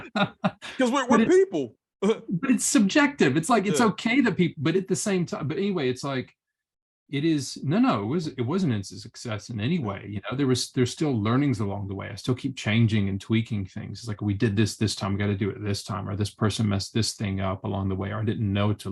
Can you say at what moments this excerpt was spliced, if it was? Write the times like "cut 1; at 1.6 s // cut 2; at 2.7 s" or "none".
none